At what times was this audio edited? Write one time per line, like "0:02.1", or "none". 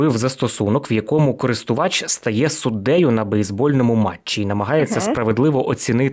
none